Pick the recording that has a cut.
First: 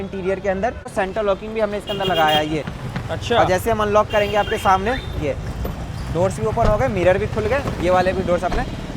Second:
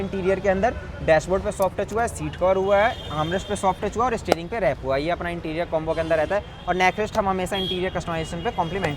first; 1 cut; at 0.9 s

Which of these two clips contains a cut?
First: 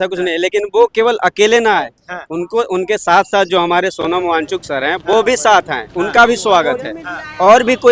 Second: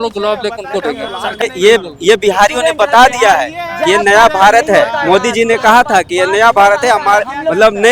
second; 1 cut; at 1.4 s

